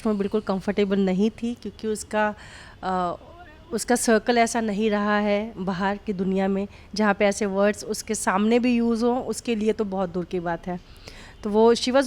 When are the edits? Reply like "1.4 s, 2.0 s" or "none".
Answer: none